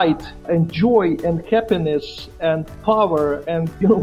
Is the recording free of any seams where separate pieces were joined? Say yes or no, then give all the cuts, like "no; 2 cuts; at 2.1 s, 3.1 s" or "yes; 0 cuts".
yes; 0 cuts